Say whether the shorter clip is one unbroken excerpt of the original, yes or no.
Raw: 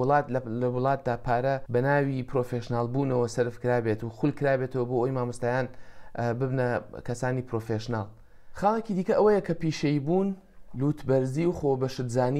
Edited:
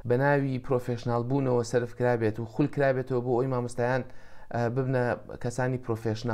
yes